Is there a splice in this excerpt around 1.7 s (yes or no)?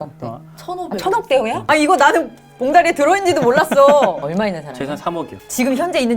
yes